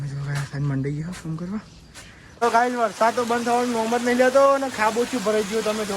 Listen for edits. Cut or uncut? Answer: cut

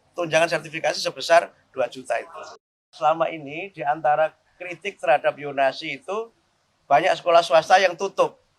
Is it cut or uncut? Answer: cut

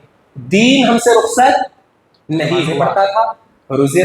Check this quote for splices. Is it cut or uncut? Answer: cut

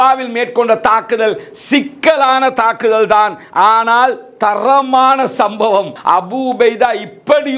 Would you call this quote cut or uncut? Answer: cut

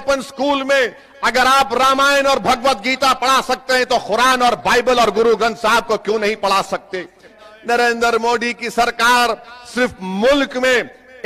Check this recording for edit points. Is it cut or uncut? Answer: cut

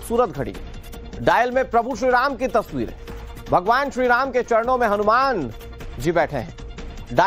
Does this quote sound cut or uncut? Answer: uncut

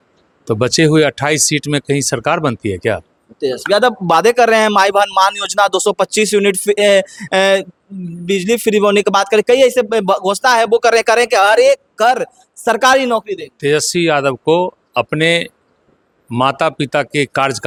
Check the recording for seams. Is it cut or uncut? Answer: uncut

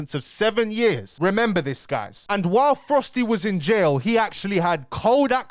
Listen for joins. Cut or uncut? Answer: cut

